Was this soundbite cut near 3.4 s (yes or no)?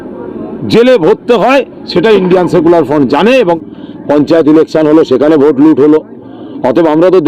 yes